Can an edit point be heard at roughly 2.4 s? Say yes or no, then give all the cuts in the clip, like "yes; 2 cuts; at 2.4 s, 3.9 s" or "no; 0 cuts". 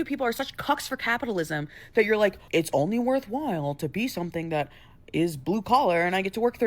yes; 1 cut; at 2.4 s